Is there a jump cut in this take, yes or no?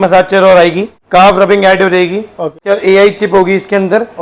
yes